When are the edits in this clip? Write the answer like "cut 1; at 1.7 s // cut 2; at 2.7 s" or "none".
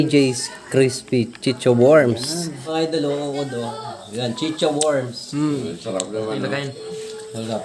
cut 1; at 2.6 s